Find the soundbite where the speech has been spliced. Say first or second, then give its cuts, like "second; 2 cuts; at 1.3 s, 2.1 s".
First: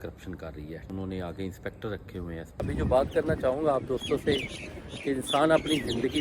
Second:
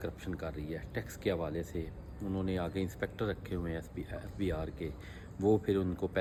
first; 2 cuts; at 0.8 s, 2.6 s